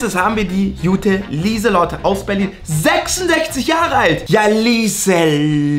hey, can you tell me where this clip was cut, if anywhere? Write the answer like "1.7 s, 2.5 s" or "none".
none